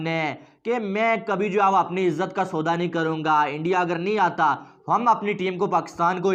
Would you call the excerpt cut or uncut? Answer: uncut